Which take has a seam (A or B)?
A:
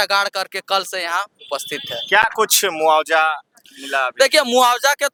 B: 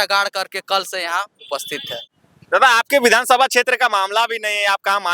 B